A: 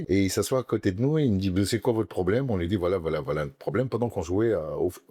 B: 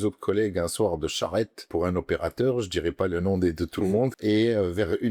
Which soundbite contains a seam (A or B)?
B